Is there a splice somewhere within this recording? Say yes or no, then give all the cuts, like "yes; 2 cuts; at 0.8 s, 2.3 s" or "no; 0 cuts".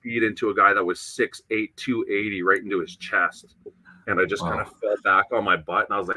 no; 0 cuts